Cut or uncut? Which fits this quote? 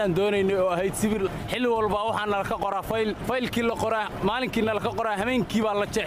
cut